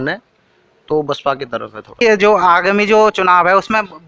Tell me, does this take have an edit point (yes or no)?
yes